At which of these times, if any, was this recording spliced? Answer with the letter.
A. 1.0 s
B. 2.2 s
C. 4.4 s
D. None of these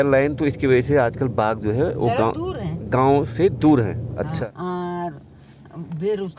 C